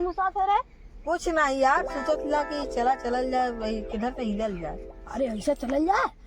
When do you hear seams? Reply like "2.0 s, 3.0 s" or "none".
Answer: none